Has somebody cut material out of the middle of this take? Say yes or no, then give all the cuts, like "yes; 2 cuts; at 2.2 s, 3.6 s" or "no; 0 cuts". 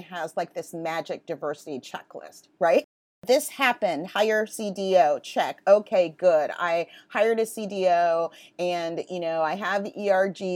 yes; 1 cut; at 2.9 s